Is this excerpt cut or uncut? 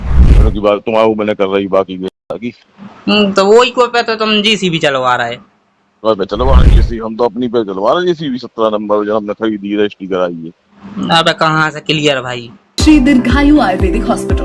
cut